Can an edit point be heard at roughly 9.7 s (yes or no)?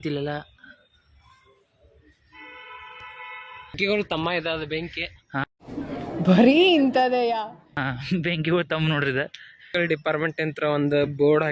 yes